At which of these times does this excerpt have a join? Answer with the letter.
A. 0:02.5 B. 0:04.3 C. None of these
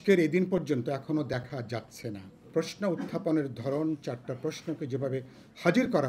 A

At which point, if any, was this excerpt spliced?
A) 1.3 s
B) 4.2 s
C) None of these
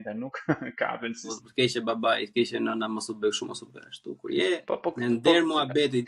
A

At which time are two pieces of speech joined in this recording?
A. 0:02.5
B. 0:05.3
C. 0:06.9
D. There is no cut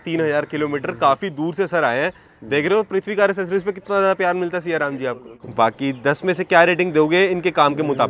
B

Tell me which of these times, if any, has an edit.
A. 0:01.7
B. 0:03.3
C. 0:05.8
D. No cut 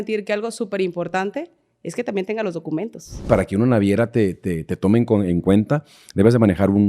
B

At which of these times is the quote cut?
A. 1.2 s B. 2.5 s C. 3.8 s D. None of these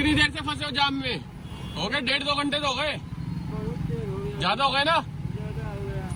D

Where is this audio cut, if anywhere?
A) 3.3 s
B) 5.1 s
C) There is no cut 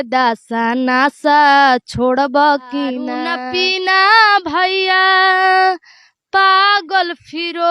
A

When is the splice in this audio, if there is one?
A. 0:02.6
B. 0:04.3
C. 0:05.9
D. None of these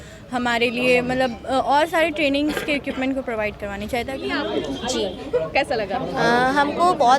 B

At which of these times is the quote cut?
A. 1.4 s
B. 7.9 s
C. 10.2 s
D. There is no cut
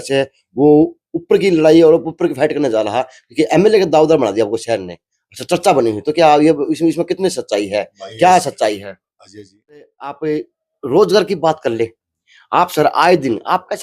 C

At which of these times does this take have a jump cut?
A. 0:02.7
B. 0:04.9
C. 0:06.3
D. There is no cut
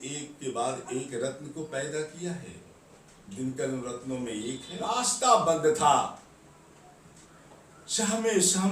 B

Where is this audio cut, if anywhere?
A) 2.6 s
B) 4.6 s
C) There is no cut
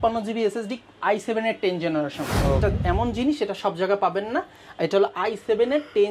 A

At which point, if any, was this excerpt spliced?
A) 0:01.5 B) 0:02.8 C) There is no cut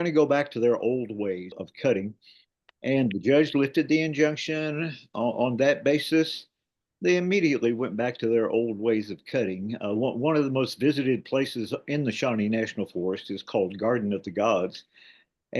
A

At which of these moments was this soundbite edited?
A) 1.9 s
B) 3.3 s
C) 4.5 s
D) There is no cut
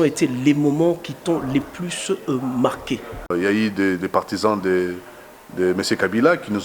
B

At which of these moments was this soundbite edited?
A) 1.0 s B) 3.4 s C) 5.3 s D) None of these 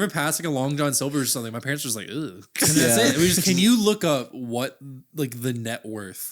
B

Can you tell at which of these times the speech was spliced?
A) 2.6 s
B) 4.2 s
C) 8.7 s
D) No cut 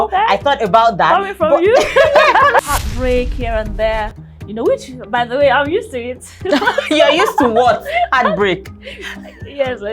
A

